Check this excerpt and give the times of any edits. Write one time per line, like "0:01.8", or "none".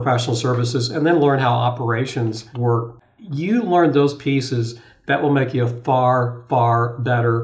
0:02.9